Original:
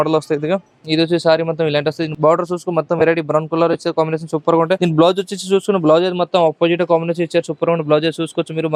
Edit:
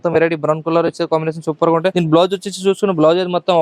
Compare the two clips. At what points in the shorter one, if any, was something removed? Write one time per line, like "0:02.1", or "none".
none